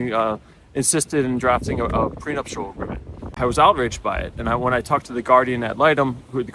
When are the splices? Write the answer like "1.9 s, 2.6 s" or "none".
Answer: 3.3 s